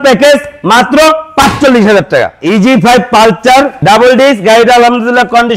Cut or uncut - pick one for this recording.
cut